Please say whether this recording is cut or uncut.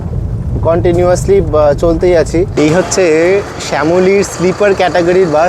cut